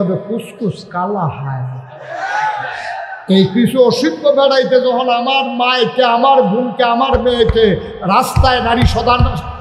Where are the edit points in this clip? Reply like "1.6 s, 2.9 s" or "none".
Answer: none